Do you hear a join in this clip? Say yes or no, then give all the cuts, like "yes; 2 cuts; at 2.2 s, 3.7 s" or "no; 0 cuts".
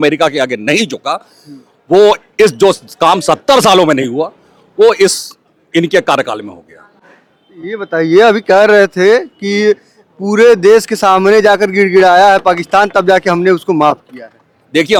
no; 0 cuts